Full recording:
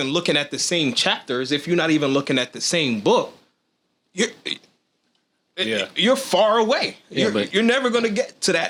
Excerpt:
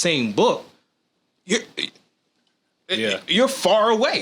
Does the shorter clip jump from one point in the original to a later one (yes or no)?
no